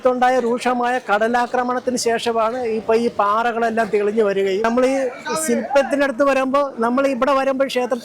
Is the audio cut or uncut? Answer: cut